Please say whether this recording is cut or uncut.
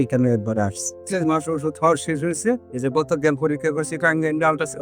cut